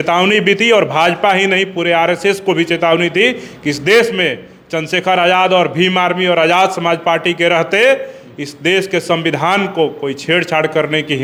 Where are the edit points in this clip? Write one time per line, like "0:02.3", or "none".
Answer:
none